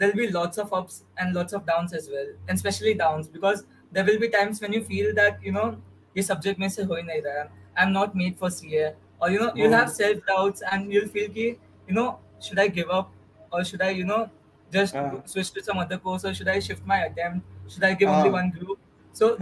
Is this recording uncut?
yes; 0 cuts

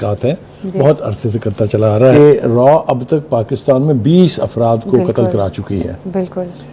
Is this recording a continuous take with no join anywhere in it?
no; 1 cut; at 2.1 s

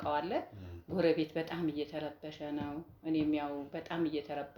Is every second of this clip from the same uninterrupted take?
yes; 0 cuts

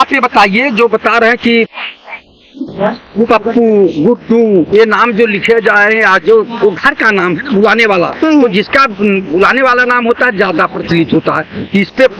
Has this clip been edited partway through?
no; 0 cuts

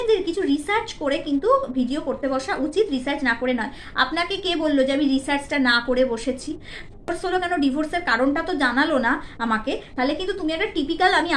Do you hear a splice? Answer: yes; 1 cut; at 7.1 s

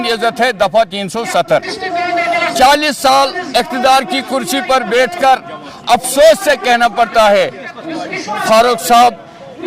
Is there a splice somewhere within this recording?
no; 0 cuts

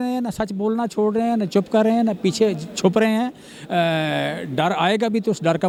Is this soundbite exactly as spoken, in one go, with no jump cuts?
yes; 0 cuts

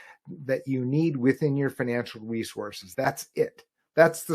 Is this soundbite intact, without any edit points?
no; 1 cut; at 2.8 s

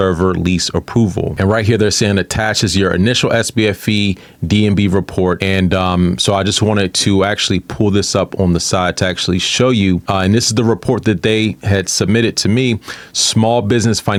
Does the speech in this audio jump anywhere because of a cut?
no; 0 cuts

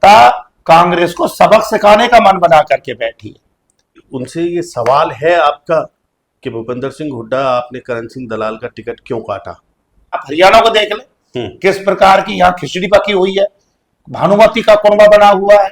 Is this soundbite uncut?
no; 2 cuts; at 4.0 s, 10.2 s

